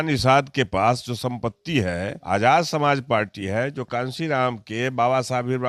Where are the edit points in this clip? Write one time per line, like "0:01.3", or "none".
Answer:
0:02.1